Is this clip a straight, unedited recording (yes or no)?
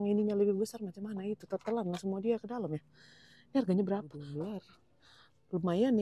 no